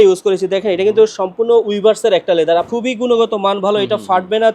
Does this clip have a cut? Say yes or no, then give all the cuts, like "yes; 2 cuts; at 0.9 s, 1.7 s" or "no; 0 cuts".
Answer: yes; 1 cut; at 2.7 s